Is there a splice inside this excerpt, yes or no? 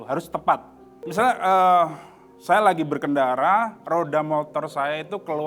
yes